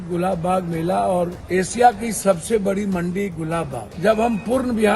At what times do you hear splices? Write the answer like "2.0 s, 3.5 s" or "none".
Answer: 1.4 s, 3.8 s